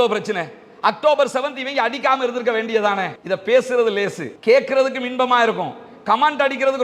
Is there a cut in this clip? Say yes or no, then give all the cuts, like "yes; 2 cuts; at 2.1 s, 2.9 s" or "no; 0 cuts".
no; 0 cuts